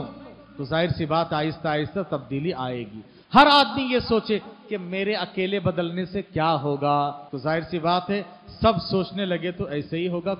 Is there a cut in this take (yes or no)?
yes